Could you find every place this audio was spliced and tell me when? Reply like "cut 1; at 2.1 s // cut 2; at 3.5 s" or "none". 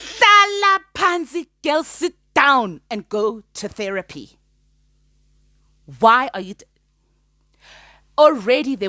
none